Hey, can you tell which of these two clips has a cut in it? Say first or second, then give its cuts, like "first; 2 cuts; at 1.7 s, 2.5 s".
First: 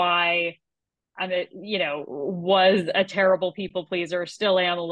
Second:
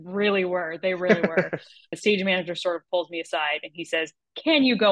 second; 1 cut; at 1.9 s